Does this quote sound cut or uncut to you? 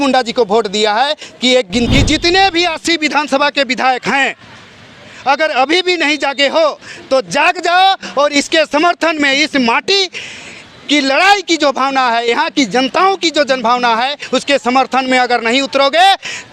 cut